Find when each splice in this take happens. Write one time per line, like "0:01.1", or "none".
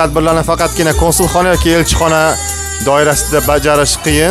none